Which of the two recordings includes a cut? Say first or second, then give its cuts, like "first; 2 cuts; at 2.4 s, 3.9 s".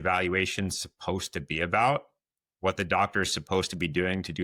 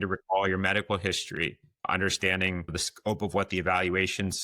second; 2 cuts; at 1.8 s, 2.7 s